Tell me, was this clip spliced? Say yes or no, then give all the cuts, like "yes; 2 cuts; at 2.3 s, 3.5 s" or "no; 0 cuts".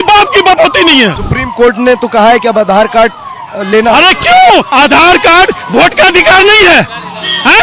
yes; 2 cuts; at 1.2 s, 4.7 s